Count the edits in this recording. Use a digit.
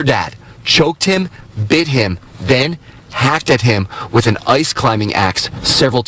1